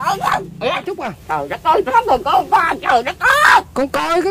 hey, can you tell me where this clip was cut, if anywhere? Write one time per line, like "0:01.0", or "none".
0:01.0